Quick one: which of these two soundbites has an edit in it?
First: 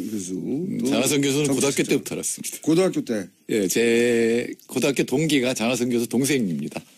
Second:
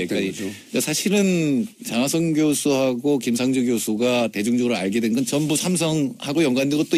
second; 1 cut; at 3.0 s

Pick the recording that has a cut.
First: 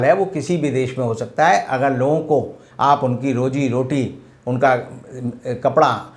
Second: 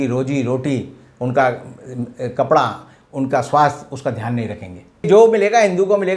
second; 1 cut; at 5.1 s

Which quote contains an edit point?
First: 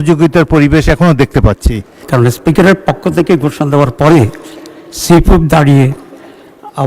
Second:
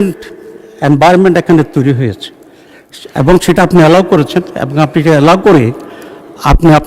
first; 1 cut; at 2.0 s

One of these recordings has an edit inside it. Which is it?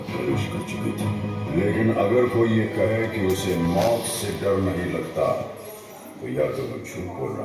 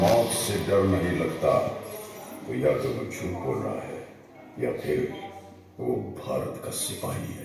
first; 1 cut; at 1.5 s

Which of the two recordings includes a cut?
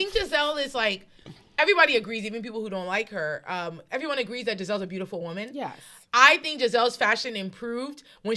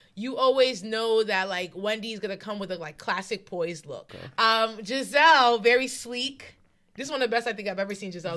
second; 1 cut; at 4.2 s

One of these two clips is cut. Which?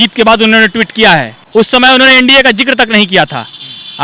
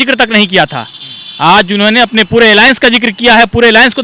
first; 1 cut; at 1.4 s

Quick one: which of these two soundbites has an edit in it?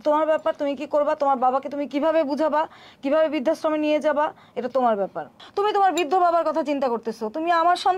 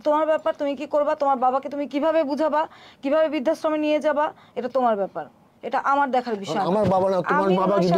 first; 1 cut; at 5.4 s

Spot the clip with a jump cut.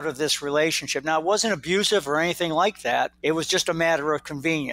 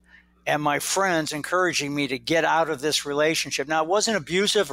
first; 1 cut; at 3.2 s

